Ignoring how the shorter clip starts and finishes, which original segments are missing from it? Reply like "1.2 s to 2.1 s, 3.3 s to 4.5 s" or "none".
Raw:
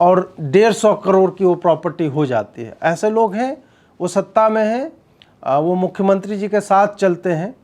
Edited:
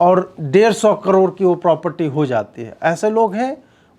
none